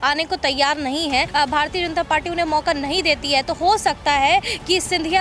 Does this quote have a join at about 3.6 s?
no; 1 cut; at 1.3 s

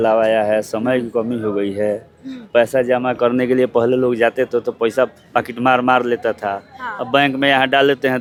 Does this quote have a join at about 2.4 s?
no; 0 cuts

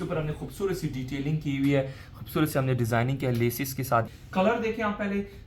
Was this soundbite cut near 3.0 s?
no; 1 cut; at 4.4 s

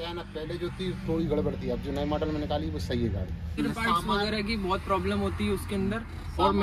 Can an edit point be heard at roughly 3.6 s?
yes; 1 cut; at 3.6 s

